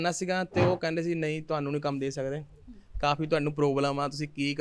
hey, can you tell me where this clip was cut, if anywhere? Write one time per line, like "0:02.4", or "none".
none